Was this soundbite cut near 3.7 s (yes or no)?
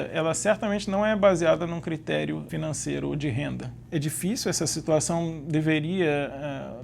yes